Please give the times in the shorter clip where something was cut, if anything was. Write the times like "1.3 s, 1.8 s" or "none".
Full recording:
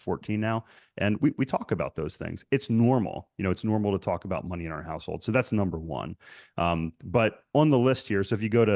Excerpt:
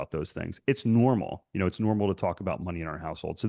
none